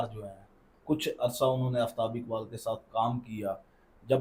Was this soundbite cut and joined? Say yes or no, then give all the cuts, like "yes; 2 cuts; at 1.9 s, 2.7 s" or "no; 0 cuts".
no; 0 cuts